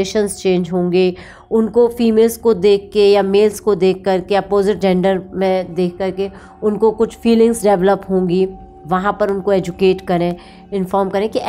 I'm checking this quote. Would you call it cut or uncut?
uncut